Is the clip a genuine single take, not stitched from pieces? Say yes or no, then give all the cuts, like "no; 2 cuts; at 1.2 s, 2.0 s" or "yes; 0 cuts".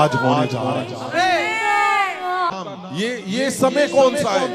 no; 1 cut; at 2.5 s